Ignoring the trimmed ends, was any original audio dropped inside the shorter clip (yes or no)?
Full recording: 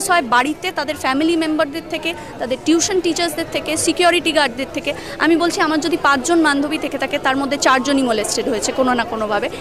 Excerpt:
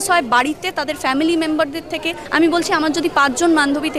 yes